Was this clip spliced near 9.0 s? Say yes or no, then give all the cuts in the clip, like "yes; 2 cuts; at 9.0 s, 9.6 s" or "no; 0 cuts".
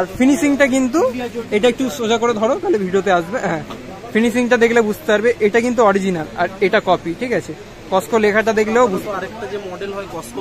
yes; 1 cut; at 9.0 s